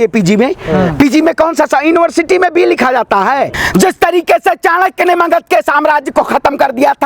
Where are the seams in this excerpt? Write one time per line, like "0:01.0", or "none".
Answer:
0:03.6

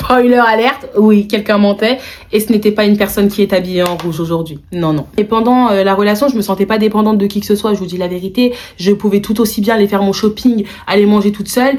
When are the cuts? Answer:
none

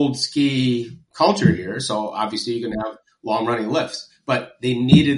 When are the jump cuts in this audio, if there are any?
none

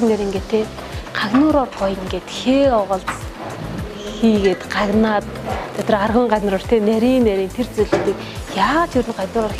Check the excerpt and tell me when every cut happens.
none

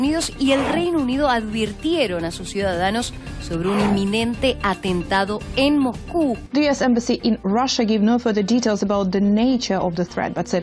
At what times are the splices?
0:06.4

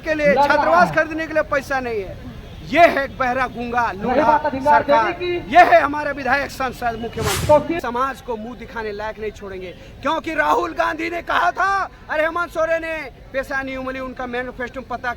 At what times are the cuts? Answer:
0:07.8

